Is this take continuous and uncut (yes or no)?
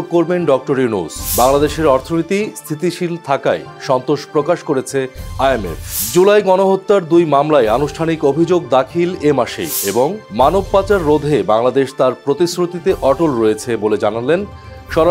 yes